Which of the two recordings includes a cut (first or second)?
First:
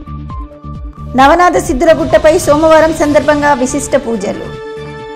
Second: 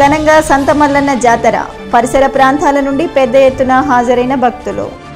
first